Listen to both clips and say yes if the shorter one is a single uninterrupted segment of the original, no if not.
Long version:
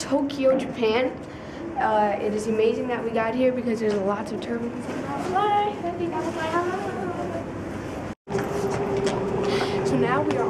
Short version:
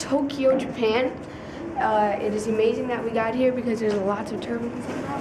yes